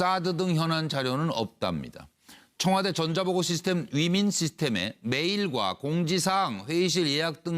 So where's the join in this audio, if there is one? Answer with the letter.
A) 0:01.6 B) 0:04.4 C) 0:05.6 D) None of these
B